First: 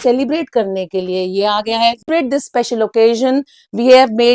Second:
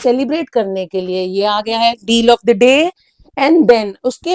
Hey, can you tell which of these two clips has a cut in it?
first; 1 cut; at 2.1 s

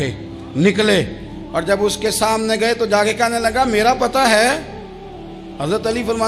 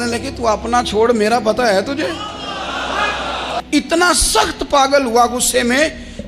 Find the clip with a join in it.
second; 1 cut; at 3.6 s

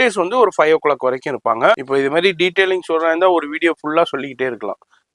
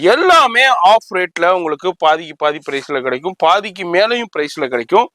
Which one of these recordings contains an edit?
first; 1 cut; at 1.8 s

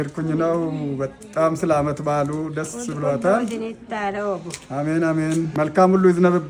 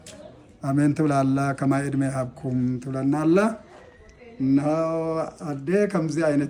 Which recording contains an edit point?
first; 1 cut; at 5.5 s

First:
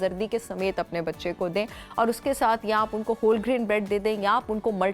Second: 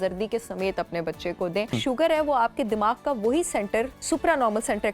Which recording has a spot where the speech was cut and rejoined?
second; 2 cuts; at 1.8 s, 4.0 s

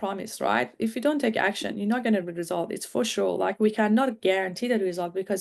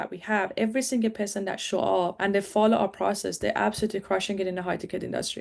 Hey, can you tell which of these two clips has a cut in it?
second; 1 cut; at 2.2 s

